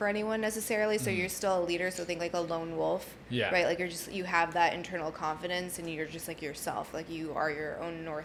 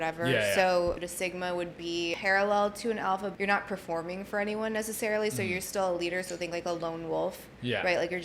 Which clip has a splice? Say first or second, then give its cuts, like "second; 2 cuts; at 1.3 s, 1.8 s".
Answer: second; 3 cuts; at 1.0 s, 2.2 s, 3.3 s